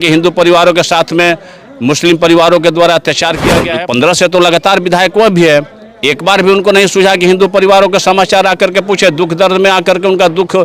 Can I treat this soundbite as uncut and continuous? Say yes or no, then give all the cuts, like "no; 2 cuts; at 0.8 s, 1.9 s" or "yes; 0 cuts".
no; 1 cut; at 3.6 s